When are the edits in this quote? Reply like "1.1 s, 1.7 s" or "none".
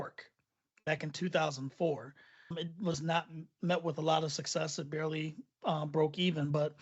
2.5 s